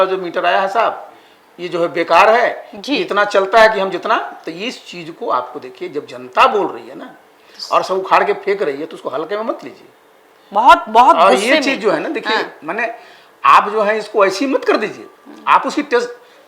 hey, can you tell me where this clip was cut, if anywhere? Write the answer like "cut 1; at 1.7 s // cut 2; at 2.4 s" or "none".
none